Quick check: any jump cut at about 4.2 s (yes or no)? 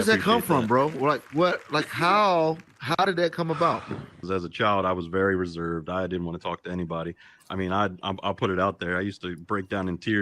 yes